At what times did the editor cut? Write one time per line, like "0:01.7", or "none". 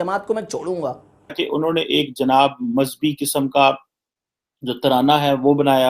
0:01.4